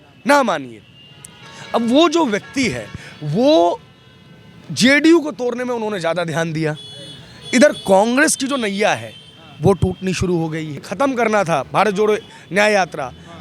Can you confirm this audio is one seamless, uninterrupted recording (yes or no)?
no